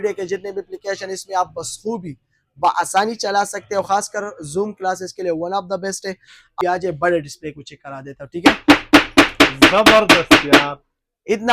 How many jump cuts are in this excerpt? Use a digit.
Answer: 1